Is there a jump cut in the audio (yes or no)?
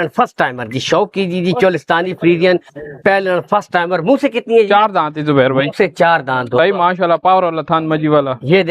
no